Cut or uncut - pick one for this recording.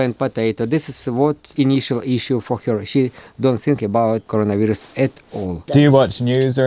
cut